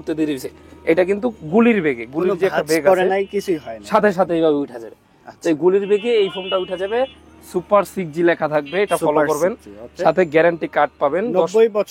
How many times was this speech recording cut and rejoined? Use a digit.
0